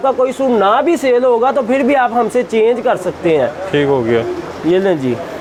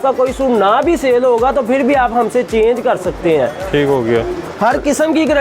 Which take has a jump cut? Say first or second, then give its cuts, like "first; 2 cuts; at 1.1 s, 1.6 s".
second; 1 cut; at 4.4 s